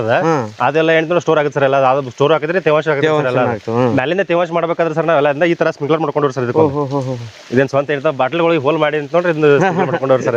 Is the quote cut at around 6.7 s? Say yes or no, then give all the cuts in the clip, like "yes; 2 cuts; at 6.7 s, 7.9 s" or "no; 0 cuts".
no; 0 cuts